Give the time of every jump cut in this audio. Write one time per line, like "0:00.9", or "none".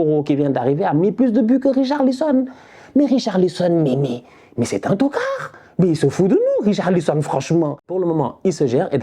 0:07.9